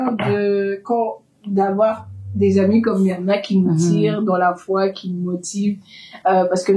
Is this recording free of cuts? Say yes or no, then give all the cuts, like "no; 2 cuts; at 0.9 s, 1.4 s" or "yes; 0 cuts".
yes; 0 cuts